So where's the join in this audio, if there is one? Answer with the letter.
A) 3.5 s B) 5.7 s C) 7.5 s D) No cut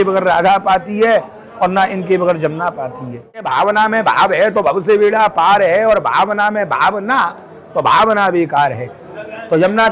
A